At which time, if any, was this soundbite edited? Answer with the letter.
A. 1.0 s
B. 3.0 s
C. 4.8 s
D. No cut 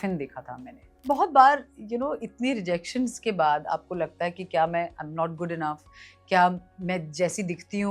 A